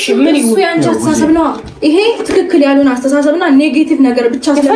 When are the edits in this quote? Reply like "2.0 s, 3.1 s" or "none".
none